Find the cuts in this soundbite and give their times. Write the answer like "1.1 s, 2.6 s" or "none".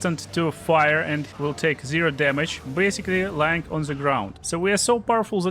1.3 s, 4.4 s